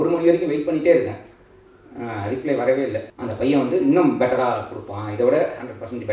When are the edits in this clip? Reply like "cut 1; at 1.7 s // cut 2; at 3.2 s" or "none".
cut 1; at 3.1 s

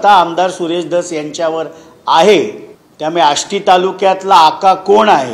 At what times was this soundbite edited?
none

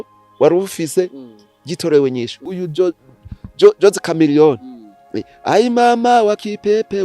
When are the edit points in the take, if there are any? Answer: cut 1; at 2.6 s

